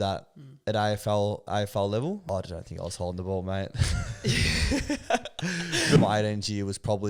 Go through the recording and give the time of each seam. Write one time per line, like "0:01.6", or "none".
0:02.2
0:06.0

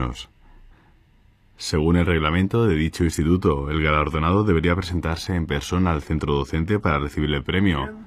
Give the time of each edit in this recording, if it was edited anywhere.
none

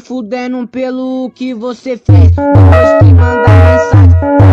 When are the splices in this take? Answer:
none

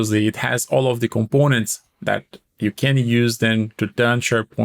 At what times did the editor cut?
none

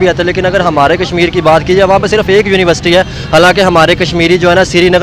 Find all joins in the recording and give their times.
none

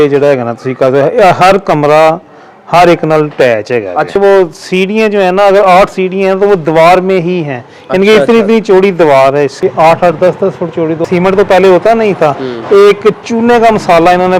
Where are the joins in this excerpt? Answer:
0:04.2
0:09.5
0:11.0

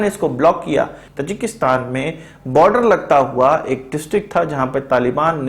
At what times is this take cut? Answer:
0:01.0

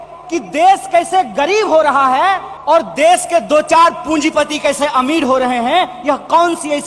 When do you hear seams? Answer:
0:02.5

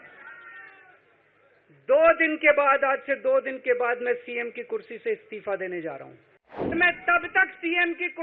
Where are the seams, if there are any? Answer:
0:06.7

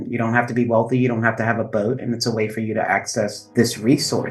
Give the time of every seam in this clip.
0:03.4

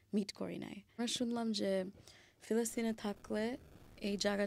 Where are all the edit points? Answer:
0:01.0

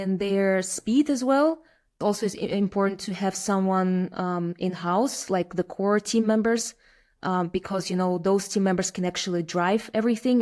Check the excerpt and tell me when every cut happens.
0:02.0

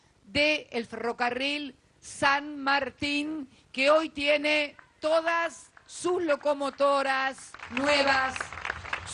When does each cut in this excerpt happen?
none

